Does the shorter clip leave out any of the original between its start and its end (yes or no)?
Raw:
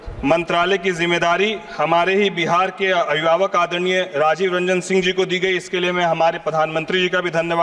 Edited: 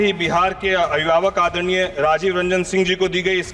no